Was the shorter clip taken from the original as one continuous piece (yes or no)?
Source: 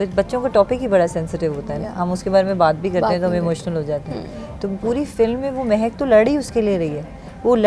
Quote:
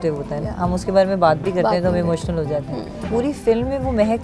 no